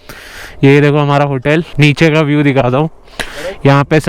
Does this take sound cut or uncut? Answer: cut